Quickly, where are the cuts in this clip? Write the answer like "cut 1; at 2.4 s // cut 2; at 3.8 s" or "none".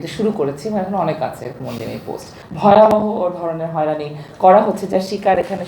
cut 1; at 2.4 s